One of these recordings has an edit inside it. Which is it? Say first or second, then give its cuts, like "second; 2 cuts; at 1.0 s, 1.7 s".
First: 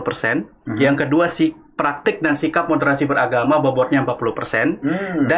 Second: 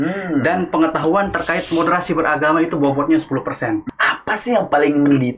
second; 1 cut; at 3.9 s